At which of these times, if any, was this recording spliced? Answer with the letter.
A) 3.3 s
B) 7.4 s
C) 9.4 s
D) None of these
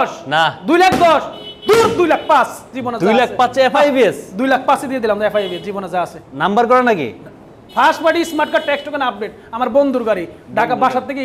D